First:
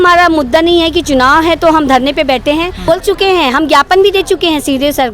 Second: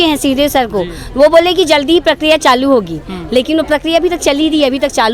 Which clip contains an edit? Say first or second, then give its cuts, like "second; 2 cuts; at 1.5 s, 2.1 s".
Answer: first; 1 cut; at 2.8 s